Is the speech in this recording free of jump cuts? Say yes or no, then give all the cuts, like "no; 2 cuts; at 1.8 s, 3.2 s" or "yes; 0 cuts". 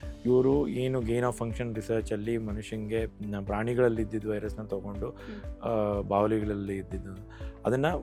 yes; 0 cuts